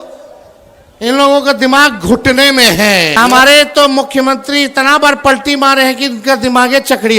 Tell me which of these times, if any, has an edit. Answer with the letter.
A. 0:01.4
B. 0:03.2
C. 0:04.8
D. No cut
B